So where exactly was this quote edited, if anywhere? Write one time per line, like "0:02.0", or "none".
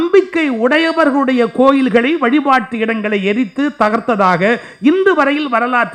none